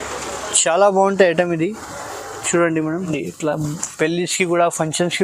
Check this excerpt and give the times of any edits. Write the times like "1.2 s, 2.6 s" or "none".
3.1 s

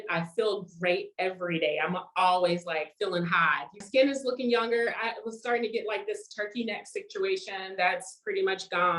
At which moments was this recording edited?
3.8 s

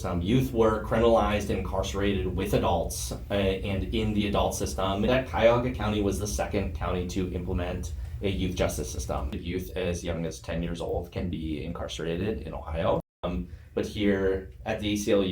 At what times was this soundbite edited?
5.1 s, 9.4 s, 13.3 s

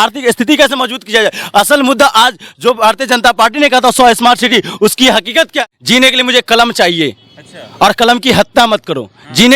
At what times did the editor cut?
5.7 s

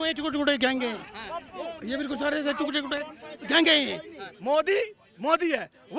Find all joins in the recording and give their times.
4.2 s

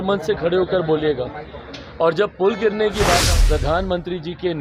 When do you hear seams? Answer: 3.2 s

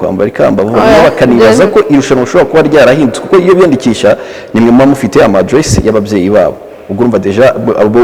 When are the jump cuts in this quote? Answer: none

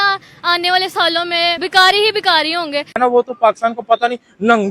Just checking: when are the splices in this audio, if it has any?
1.6 s, 2.9 s

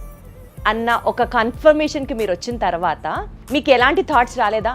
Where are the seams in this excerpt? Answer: 3.3 s

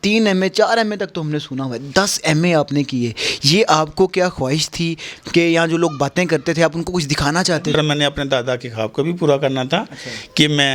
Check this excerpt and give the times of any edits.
7.7 s

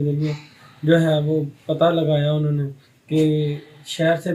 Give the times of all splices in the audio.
none

